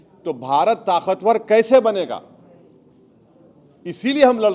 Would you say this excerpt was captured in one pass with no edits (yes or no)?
yes